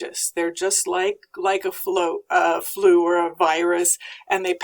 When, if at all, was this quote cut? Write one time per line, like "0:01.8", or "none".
none